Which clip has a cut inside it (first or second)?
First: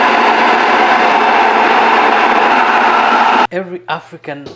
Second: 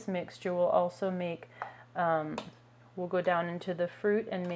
first